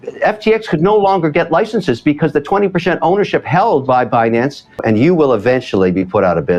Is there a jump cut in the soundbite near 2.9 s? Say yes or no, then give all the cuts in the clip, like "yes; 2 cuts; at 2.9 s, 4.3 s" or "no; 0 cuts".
no; 1 cut; at 4.8 s